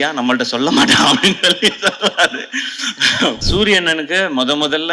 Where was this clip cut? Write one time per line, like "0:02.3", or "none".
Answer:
0:03.4